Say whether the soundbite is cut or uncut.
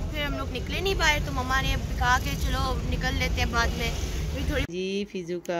cut